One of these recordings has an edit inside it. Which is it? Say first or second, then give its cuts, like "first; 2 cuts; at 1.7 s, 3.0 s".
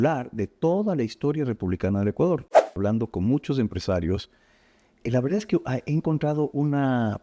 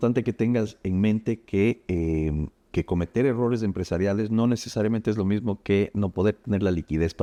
first; 1 cut; at 2.6 s